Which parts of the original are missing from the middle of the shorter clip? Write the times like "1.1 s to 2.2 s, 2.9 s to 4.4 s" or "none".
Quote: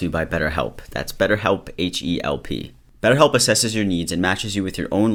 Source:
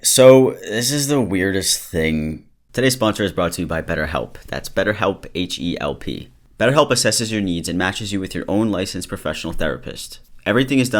none

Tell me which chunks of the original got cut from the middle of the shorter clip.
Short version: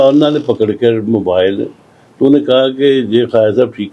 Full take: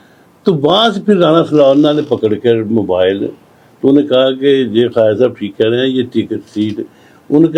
none

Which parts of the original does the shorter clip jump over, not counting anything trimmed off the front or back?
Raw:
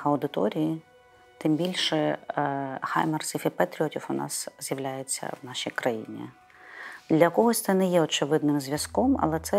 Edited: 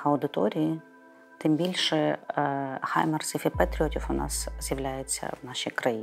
none

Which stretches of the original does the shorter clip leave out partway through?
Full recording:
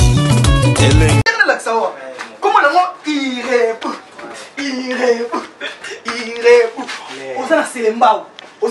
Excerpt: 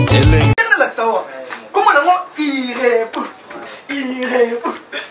none

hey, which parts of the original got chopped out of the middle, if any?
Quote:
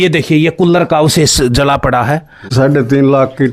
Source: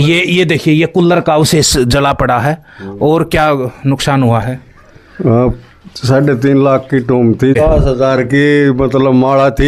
2.7 s to 5.9 s

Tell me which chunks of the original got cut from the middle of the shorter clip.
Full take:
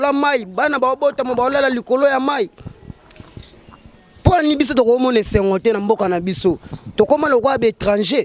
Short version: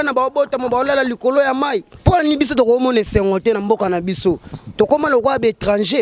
2.6 s to 4.1 s

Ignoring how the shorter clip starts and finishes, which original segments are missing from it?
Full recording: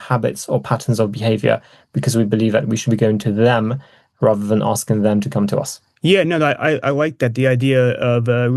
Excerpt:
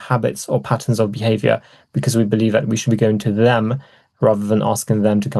none

